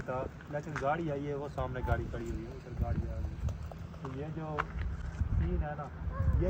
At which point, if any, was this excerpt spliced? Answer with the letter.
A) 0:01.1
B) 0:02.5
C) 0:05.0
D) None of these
D